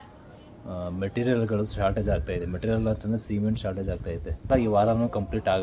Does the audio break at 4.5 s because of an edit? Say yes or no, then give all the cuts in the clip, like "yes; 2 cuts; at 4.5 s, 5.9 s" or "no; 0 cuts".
yes; 1 cut; at 4.5 s